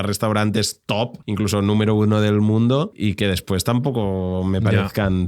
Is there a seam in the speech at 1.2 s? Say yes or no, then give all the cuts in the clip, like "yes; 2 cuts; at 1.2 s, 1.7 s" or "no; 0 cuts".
yes; 2 cuts; at 1.2 s, 3.0 s